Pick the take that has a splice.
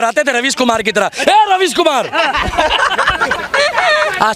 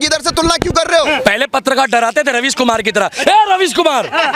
second; 1 cut; at 1.1 s

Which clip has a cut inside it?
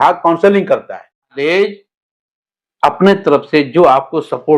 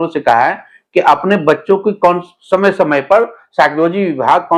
first; 1 cut; at 1.3 s

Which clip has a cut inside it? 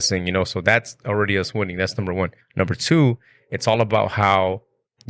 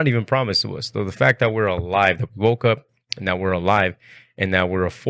first; 1 cut; at 2.4 s

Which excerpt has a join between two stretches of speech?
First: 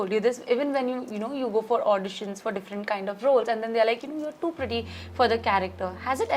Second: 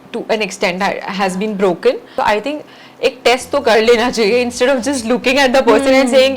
second; 1 cut; at 2.1 s

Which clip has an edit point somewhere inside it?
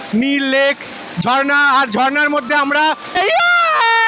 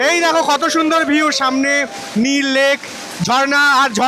first; 1 cut; at 3.2 s

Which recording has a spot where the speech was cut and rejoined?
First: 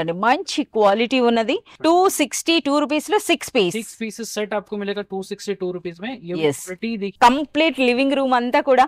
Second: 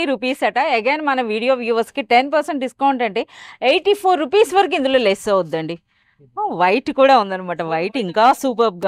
first; 2 cuts; at 1.7 s, 7.1 s

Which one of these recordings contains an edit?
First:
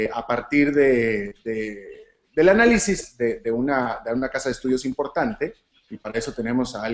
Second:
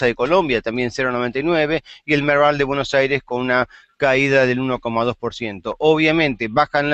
first; 1 cut; at 1.2 s

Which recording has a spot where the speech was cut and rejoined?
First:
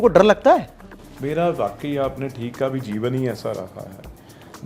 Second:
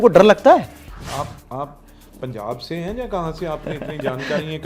second; 1 cut; at 1.0 s

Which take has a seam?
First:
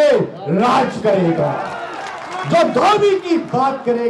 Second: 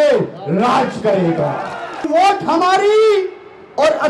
second; 1 cut; at 2.1 s

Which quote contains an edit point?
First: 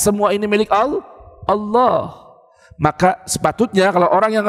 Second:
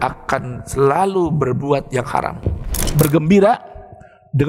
second; 1 cut; at 2.9 s

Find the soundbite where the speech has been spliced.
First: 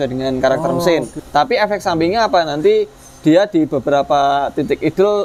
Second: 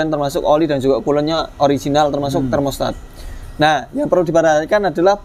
first; 1 cut; at 1.1 s

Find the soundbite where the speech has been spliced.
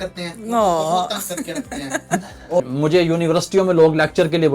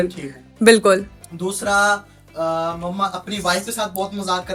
first; 1 cut; at 2.6 s

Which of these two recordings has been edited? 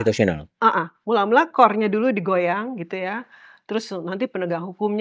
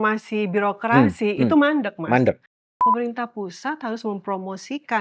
second; 1 cut; at 2.7 s

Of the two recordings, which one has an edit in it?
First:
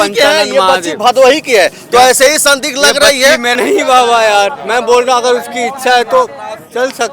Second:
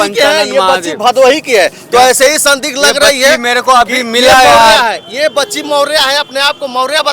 first; 1 cut; at 3.5 s

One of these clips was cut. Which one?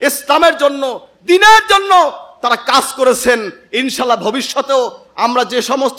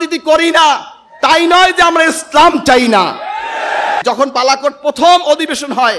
second; 1 cut; at 4.0 s

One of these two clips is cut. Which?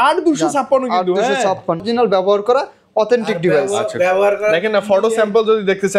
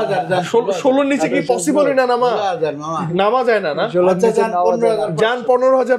first; 1 cut; at 1.8 s

